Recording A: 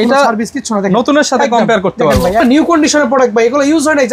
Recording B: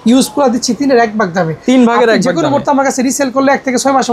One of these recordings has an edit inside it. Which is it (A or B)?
A